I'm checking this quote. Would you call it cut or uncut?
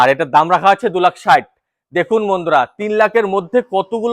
uncut